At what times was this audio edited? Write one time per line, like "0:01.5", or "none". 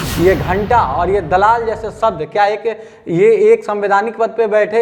none